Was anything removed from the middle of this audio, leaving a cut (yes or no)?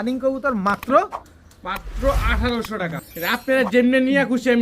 yes